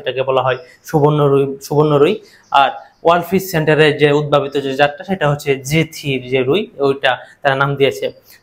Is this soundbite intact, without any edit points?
yes; 0 cuts

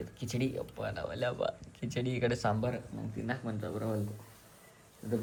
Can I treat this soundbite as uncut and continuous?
yes; 0 cuts

